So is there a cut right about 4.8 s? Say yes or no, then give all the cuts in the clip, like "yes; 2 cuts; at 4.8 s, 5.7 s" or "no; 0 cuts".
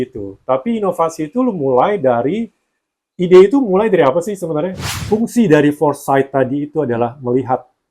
yes; 1 cut; at 4.8 s